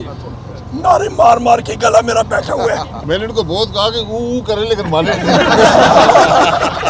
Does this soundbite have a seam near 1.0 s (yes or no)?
no